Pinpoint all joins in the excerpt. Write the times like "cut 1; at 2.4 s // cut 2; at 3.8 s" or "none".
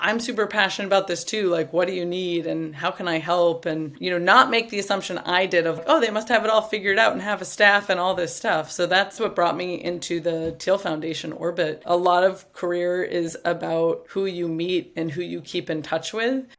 cut 1; at 5.8 s // cut 2; at 11.8 s // cut 3; at 14.0 s